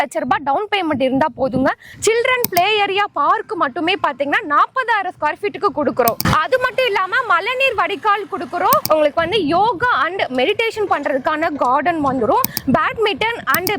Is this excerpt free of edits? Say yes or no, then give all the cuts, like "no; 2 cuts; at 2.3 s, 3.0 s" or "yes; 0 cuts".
no; 1 cut; at 1.9 s